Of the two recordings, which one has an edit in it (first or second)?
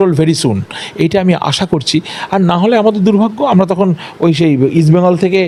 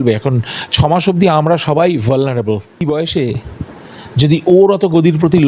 second